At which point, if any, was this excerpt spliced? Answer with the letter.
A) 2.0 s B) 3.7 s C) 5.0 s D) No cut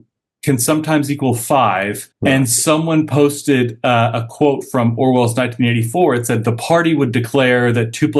A